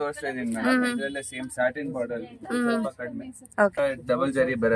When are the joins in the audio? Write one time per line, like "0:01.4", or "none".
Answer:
0:03.8